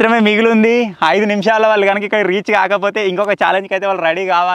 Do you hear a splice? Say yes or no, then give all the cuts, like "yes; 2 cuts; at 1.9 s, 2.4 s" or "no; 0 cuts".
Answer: no; 0 cuts